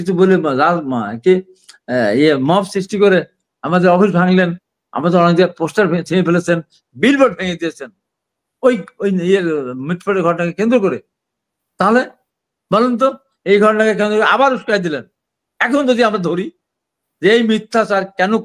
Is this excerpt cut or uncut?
uncut